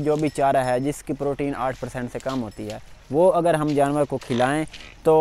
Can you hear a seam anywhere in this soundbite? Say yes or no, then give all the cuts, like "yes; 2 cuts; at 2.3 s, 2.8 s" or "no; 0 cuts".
no; 0 cuts